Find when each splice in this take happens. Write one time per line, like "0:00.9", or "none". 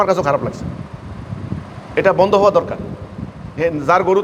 none